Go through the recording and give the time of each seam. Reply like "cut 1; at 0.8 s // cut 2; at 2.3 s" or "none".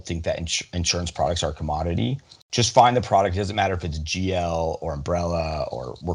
cut 1; at 2.3 s